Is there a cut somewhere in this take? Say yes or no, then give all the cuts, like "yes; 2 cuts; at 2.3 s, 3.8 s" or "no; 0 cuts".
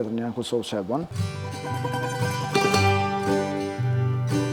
yes; 1 cut; at 1.6 s